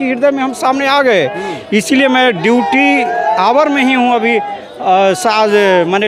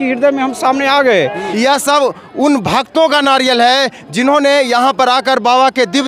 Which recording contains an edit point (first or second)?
second